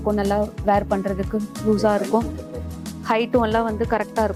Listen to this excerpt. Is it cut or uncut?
uncut